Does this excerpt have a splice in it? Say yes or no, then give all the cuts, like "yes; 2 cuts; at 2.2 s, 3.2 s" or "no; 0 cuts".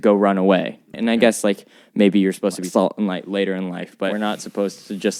yes; 3 cuts; at 0.9 s, 2.6 s, 4.1 s